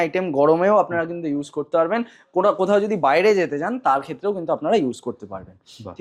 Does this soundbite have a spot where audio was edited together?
no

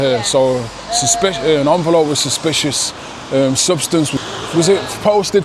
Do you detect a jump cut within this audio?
yes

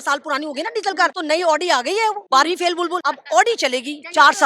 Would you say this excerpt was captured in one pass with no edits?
no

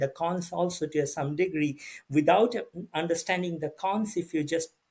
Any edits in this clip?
no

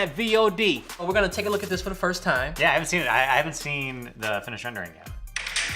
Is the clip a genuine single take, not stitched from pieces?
no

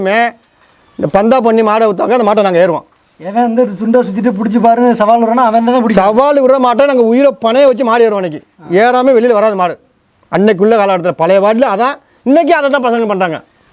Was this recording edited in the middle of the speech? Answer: no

